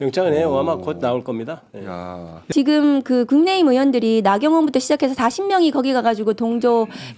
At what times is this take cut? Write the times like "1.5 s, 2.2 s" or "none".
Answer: 2.5 s